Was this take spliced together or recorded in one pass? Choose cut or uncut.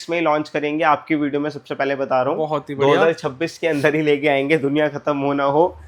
uncut